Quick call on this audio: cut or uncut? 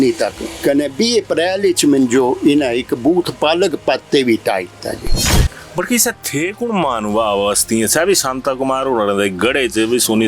uncut